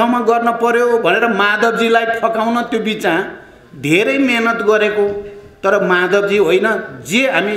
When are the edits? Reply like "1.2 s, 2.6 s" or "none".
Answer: none